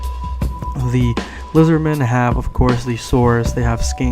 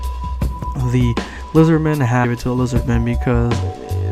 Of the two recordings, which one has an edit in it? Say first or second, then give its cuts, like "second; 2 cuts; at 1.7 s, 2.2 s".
first; 1 cut; at 2.2 s